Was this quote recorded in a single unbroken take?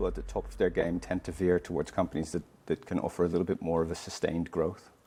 yes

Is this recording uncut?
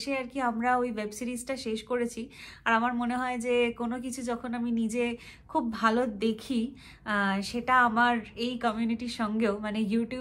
yes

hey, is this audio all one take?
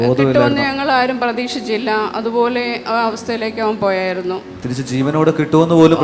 yes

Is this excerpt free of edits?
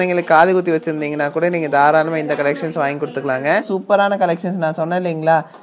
no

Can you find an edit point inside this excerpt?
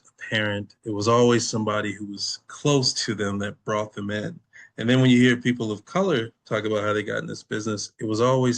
no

